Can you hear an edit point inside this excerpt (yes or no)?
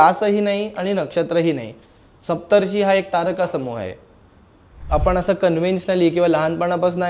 yes